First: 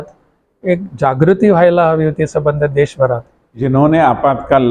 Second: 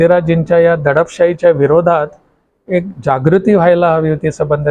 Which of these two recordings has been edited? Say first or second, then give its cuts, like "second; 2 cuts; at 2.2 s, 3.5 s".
first; 1 cut; at 3.6 s